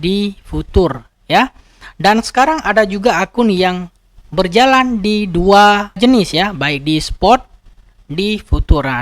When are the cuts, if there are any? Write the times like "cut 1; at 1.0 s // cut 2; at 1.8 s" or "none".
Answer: cut 1; at 6.0 s